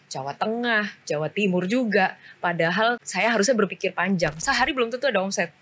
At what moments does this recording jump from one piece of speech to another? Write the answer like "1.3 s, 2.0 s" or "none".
3.1 s, 4.4 s